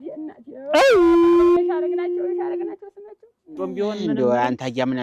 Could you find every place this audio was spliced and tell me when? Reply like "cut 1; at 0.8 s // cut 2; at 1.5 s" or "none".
cut 1; at 3.6 s